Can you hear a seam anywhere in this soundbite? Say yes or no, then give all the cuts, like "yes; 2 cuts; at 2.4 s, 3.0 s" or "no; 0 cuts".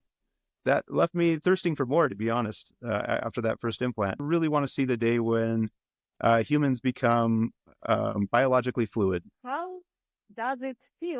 yes; 2 cuts; at 4.2 s, 9.3 s